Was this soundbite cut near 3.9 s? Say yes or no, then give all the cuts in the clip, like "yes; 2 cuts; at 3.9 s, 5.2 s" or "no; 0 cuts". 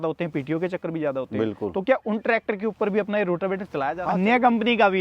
yes; 1 cut; at 3.9 s